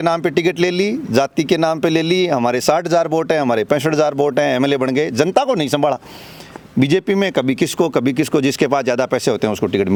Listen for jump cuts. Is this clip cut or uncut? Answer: uncut